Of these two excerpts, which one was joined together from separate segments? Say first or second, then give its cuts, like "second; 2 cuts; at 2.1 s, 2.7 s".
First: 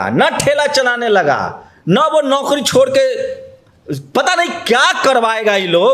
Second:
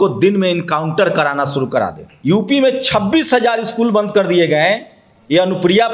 second; 1 cut; at 2.1 s